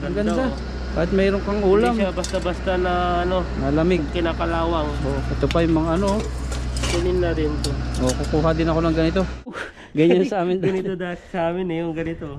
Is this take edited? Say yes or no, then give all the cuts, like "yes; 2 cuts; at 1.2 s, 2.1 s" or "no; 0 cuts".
yes; 1 cut; at 9.7 s